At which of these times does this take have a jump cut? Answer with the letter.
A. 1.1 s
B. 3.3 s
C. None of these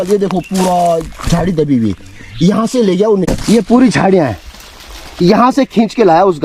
B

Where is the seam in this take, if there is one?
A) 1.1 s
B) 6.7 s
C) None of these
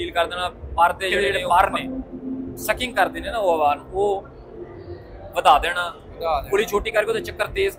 A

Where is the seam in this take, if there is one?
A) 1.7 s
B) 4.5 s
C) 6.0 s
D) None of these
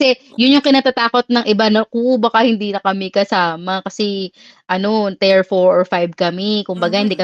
D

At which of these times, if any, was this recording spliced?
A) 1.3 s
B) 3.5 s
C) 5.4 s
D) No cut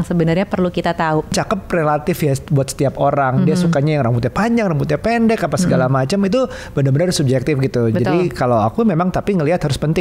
A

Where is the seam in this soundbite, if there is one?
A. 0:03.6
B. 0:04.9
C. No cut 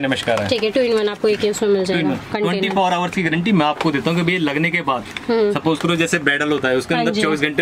C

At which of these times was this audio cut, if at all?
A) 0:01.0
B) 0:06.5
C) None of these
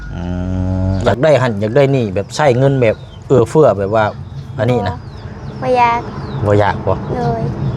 A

